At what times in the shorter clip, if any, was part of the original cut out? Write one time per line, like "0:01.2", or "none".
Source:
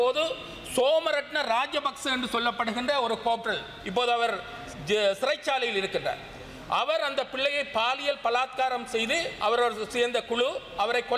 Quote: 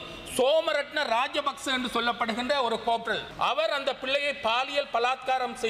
0:03.3